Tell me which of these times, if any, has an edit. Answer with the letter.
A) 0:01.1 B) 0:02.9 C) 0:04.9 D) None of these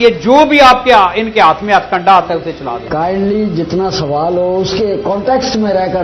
B